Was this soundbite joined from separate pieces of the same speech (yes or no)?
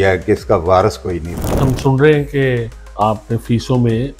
yes